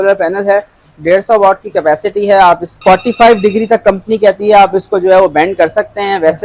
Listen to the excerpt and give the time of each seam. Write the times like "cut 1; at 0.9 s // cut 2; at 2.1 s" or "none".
cut 1; at 2.7 s

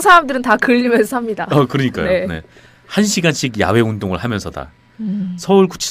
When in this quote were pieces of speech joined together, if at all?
cut 1; at 3.1 s

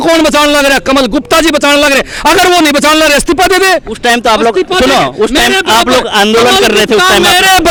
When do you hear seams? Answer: none

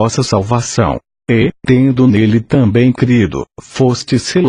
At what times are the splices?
cut 1; at 2.6 s

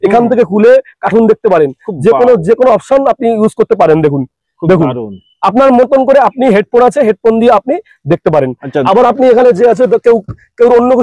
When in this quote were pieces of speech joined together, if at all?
none

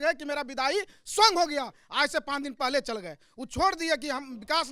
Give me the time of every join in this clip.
none

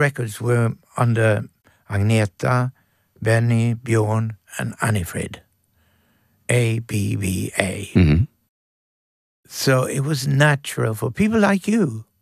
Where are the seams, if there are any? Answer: none

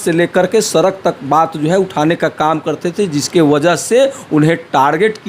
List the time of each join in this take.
none

